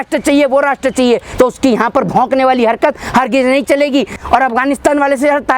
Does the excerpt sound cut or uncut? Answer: cut